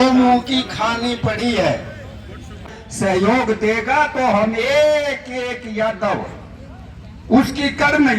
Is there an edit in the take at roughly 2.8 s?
yes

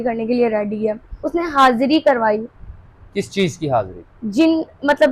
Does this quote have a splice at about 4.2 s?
no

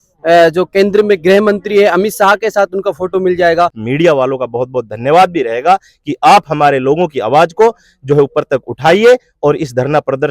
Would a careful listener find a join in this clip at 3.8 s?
yes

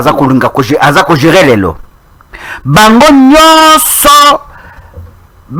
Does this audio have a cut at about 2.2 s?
no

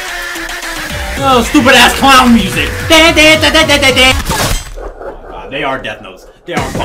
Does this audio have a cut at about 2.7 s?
no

